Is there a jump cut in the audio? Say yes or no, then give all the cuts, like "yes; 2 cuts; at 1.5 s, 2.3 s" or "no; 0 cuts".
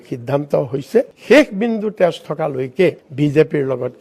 yes; 1 cut; at 1.1 s